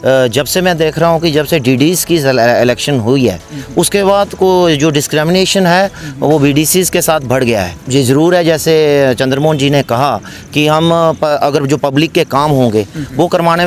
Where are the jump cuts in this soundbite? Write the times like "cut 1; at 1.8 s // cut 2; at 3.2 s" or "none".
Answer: none